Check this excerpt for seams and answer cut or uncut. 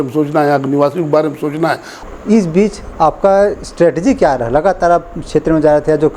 cut